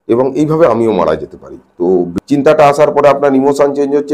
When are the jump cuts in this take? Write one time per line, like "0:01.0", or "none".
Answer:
0:02.1